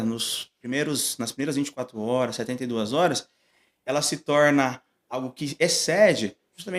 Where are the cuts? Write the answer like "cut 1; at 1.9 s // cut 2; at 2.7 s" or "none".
none

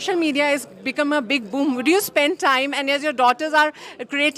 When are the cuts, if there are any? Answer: none

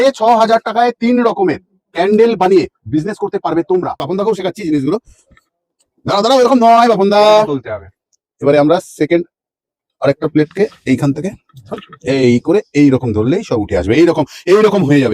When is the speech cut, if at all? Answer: cut 1; at 4.0 s

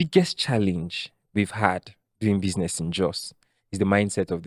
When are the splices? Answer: none

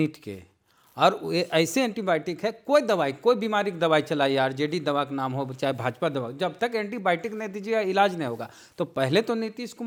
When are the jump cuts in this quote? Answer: none

